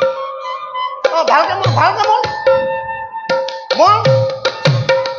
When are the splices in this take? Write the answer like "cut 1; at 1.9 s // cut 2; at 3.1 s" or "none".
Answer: none